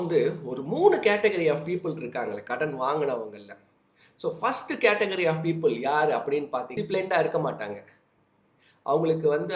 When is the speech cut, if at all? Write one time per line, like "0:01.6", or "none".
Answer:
0:06.7